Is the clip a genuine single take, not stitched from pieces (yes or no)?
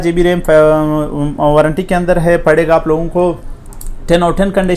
yes